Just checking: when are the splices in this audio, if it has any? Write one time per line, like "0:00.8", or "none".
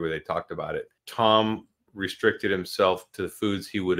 0:01.0